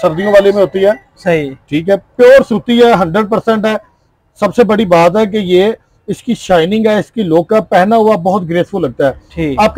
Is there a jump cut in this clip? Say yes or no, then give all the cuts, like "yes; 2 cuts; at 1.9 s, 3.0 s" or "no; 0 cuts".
no; 0 cuts